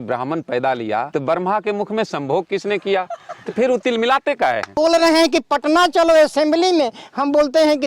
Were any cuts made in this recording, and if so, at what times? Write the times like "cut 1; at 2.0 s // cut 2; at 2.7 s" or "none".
cut 1; at 1.1 s // cut 2; at 4.7 s